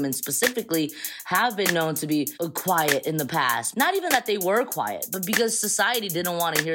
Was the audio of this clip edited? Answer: yes; 2 cuts; at 2.3 s, 3.6 s

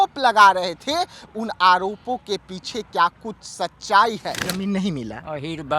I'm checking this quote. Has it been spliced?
yes; 1 cut; at 4.4 s

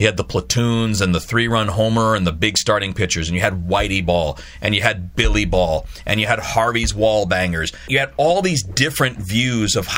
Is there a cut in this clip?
yes; 1 cut; at 7.8 s

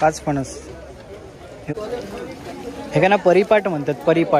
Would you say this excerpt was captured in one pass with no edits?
no; 1 cut; at 1.7 s

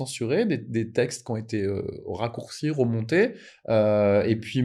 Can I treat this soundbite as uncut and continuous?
yes; 0 cuts

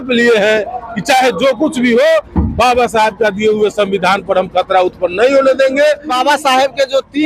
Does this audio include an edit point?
yes; 1 cut; at 6.1 s

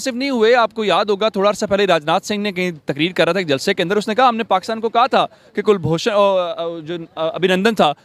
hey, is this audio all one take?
yes; 0 cuts

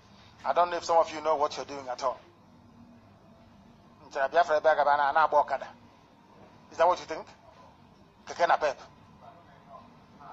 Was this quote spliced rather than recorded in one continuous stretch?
no; 0 cuts

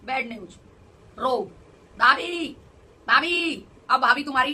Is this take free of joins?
yes; 0 cuts

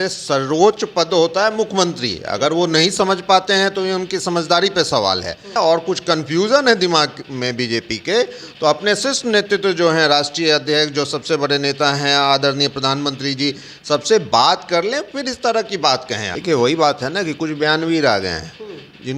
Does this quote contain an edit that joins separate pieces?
yes; 2 cuts; at 5.5 s, 16.3 s

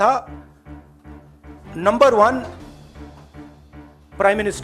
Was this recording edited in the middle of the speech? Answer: no; 0 cuts

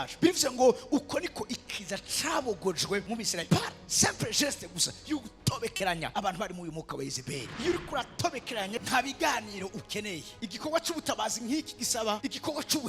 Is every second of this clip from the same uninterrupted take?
no; 2 cuts; at 7.5 s, 8.8 s

